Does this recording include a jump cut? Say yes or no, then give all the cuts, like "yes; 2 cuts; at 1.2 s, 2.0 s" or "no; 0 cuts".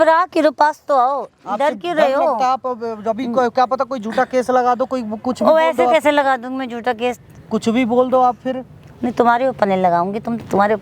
no; 0 cuts